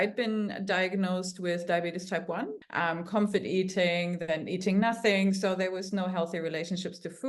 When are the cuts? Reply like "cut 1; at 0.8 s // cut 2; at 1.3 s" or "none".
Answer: cut 1; at 2.6 s